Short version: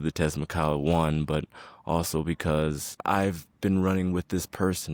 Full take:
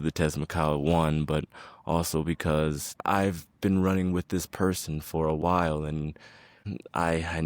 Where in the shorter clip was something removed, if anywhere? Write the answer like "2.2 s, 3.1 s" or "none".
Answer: none